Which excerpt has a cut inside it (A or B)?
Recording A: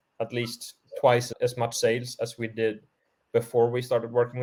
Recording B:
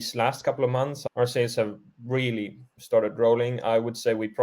B